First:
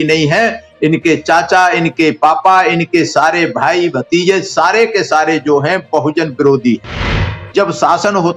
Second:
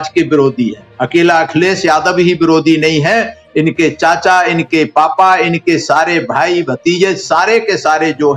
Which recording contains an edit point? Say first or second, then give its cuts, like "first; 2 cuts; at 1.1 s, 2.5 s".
first; 1 cut; at 7.4 s